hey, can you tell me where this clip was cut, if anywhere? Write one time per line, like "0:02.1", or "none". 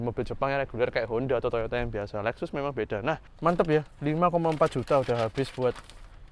0:03.3